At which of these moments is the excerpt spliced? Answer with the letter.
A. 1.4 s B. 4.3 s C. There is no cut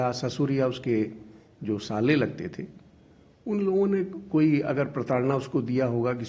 C